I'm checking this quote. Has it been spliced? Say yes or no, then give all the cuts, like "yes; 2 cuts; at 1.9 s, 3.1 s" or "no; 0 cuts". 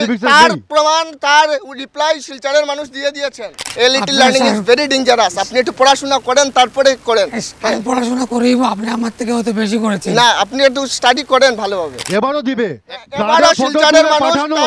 yes; 2 cuts; at 3.6 s, 12.0 s